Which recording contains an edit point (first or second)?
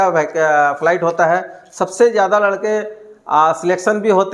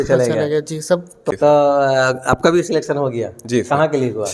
second